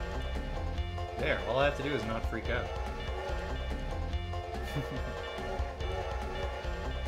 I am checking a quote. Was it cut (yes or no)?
no